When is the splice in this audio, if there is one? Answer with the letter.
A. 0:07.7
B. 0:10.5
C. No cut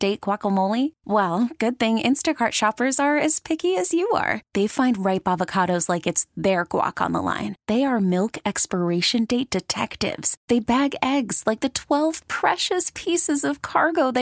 C